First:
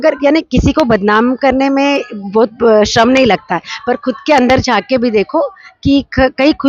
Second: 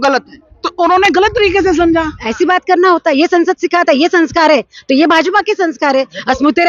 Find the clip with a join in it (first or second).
second